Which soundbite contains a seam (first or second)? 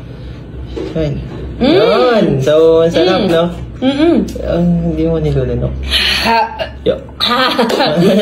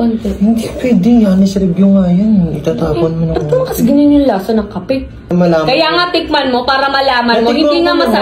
second